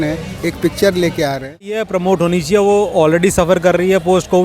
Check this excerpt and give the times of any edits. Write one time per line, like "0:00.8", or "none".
0:01.9